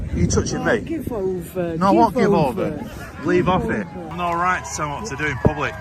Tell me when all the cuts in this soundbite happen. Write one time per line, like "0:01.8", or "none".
0:04.1